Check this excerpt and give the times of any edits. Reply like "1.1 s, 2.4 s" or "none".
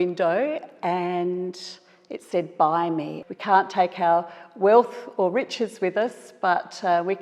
3.2 s

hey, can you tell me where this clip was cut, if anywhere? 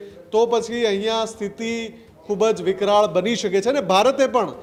none

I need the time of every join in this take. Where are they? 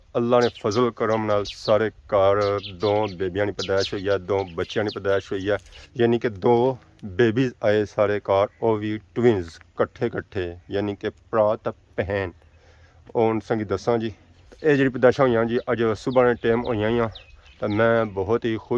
none

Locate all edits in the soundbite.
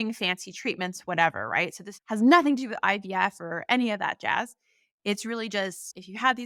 none

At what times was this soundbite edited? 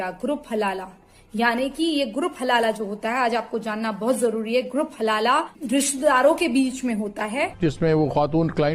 5.6 s, 7.5 s

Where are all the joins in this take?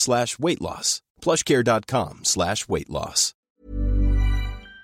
3.6 s

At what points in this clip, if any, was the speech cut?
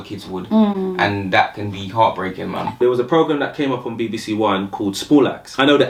none

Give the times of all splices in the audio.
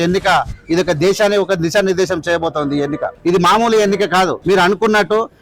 3.1 s, 4.4 s

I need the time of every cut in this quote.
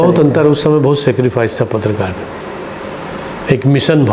none

